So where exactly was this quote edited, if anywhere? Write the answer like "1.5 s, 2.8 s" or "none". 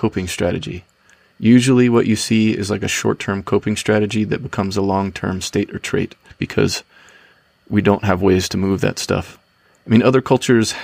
6.4 s